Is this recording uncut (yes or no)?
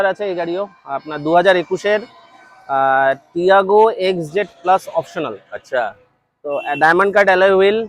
yes